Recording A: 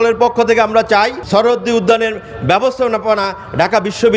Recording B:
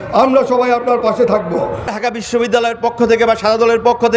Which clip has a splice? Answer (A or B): B